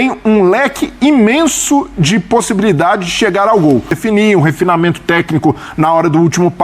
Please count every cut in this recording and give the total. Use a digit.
1